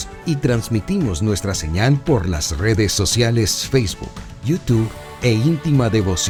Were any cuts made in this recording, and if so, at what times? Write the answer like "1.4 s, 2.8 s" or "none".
none